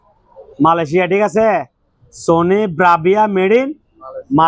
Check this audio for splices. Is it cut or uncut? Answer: uncut